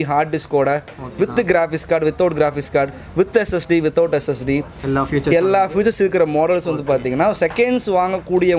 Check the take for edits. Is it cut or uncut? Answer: uncut